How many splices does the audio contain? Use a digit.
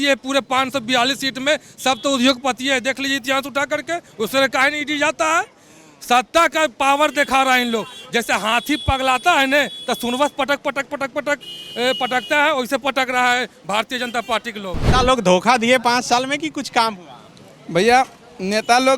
1